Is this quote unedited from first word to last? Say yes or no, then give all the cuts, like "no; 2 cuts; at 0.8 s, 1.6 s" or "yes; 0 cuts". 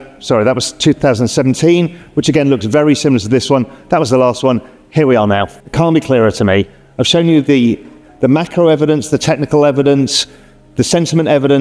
no; 1 cut; at 5.6 s